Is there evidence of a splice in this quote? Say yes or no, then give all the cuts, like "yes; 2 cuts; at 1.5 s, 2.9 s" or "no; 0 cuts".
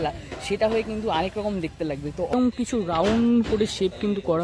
yes; 1 cut; at 2.4 s